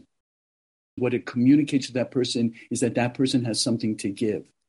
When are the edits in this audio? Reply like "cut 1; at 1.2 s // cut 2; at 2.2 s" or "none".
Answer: cut 1; at 1.0 s

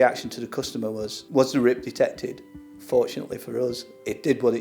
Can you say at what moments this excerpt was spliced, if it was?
cut 1; at 1.1 s

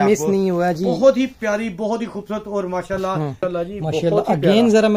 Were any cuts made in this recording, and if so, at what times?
cut 1; at 3.4 s

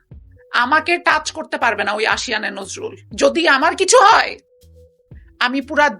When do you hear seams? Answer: cut 1; at 3.0 s

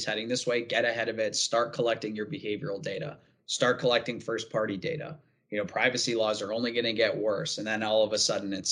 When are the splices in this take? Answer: none

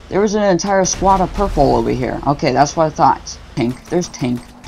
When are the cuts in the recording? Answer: cut 1; at 3.4 s

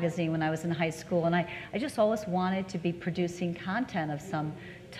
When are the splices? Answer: cut 1; at 3.6 s

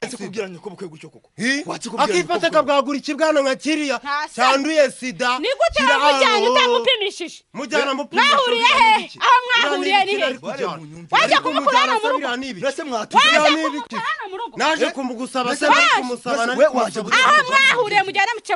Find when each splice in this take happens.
none

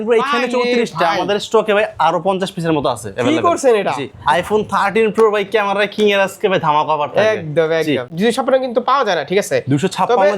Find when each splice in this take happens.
cut 1; at 4.1 s // cut 2; at 8.1 s

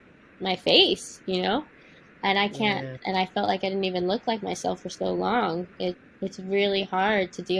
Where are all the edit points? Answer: none

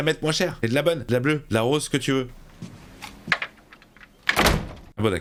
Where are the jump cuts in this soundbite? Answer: none

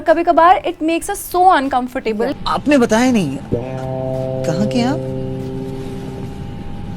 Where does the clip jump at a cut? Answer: cut 1; at 2.3 s

